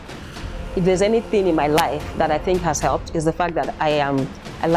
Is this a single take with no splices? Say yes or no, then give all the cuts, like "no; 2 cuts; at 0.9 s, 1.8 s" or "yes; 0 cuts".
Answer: yes; 0 cuts